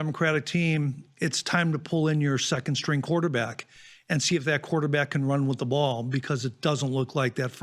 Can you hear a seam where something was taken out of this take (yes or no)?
no